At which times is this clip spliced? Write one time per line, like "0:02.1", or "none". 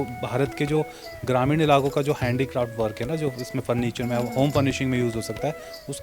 none